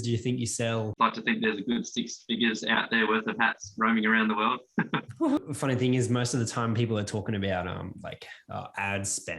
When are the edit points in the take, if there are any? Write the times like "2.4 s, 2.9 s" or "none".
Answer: 0.9 s, 5.4 s